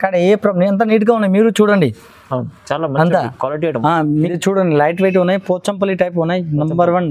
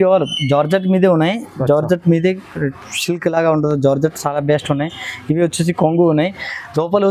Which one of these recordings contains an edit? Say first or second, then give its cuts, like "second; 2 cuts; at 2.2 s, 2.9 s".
first; 1 cut; at 4.3 s